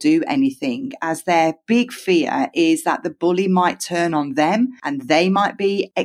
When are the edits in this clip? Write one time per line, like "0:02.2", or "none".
none